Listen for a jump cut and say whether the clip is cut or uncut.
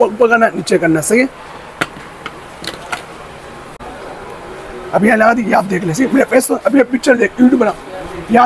cut